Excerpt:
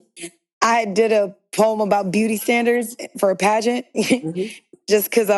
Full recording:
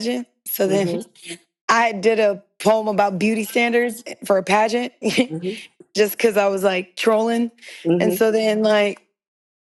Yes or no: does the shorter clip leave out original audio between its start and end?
no